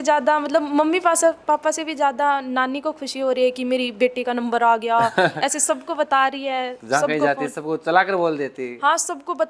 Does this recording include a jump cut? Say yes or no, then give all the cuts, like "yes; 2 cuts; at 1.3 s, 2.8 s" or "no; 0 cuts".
no; 0 cuts